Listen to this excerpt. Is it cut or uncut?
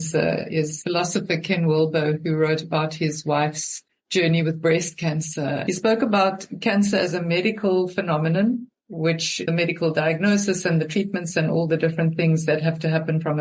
cut